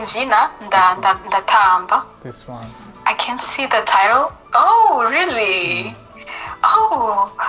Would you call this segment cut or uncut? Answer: uncut